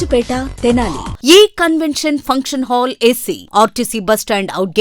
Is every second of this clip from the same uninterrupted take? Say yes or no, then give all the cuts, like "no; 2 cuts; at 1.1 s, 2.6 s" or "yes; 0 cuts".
no; 1 cut; at 1.1 s